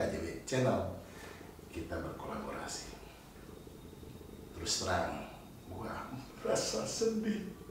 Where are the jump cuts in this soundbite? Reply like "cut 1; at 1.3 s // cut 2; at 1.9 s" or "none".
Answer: cut 1; at 3.3 s